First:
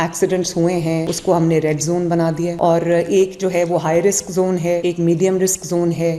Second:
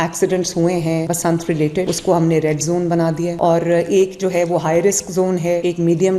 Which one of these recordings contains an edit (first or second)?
first